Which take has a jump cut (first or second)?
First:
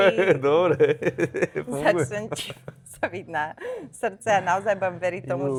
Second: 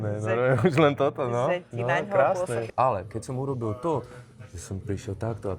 second